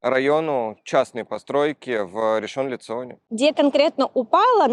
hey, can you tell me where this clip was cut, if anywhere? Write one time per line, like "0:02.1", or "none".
none